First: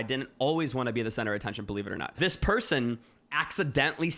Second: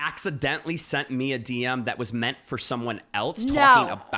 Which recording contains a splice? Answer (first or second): first